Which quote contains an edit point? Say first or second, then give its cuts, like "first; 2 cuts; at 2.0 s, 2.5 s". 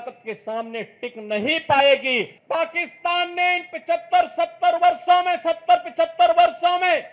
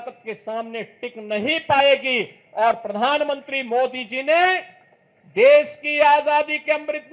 first; 1 cut; at 2.4 s